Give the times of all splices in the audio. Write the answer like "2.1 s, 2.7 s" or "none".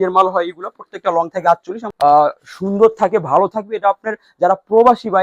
1.9 s